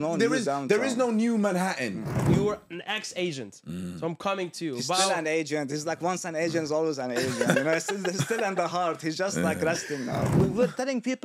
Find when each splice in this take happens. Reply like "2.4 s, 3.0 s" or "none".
2.2 s, 10.3 s